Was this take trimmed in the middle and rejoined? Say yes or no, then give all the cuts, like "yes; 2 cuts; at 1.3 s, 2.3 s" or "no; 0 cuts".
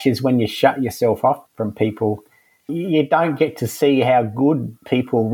yes; 2 cuts; at 1.5 s, 2.7 s